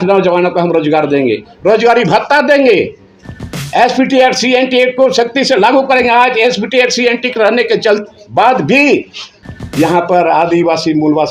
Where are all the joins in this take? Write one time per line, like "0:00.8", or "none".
none